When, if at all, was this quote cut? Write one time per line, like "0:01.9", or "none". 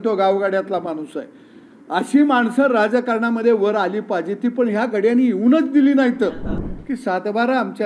0:06.7